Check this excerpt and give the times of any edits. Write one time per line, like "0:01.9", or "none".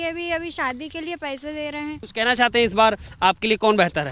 0:02.0